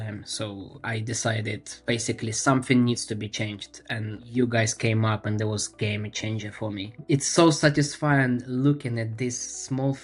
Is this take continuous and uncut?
no; 3 cuts; at 1.7 s, 4.3 s, 7.0 s

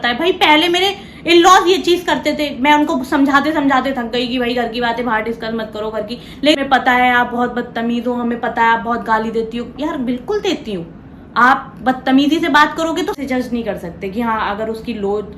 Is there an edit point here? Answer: yes; 2 cuts; at 6.6 s, 13.2 s

